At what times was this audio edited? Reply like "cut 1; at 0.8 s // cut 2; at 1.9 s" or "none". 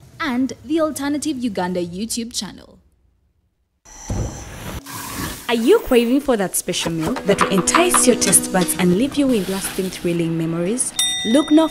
cut 1; at 3.8 s